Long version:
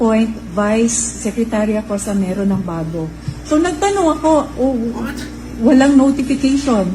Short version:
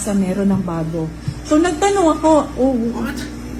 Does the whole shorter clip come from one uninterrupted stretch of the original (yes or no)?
yes